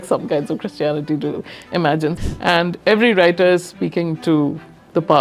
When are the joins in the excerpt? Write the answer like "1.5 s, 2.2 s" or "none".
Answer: 2.2 s